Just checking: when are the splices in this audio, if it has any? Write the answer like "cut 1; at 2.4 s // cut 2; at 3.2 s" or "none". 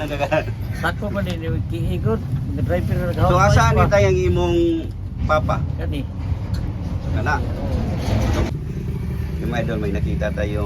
cut 1; at 8.5 s